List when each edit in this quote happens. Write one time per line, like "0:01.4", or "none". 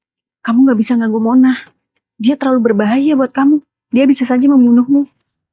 0:03.8